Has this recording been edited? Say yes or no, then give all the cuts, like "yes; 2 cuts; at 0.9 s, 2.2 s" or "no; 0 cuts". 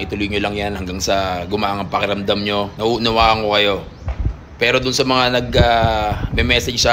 yes; 1 cut; at 2.7 s